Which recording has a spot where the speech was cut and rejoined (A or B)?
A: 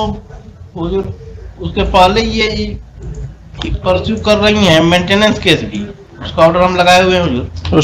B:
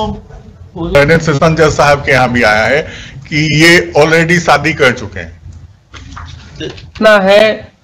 B